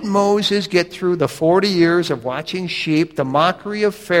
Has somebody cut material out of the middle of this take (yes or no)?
yes